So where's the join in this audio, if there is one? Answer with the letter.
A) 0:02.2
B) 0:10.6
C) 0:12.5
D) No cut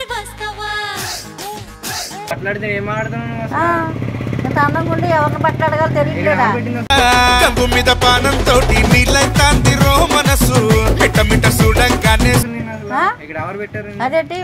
D